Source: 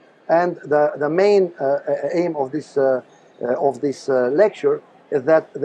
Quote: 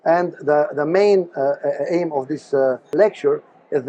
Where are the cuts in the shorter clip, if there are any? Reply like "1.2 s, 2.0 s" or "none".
2.9 s